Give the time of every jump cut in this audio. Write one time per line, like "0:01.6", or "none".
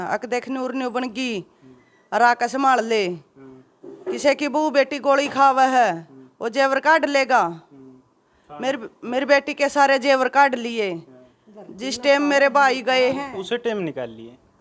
none